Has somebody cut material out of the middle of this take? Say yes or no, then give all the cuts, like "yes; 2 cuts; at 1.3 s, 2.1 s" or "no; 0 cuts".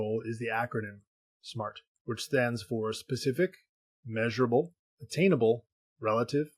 yes; 1 cut; at 1.9 s